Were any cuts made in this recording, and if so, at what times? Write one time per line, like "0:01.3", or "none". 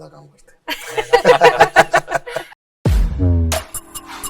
0:02.7